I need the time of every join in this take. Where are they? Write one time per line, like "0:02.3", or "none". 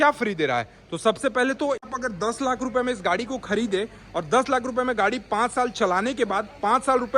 0:01.8